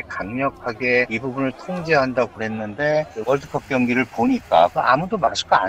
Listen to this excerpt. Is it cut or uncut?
cut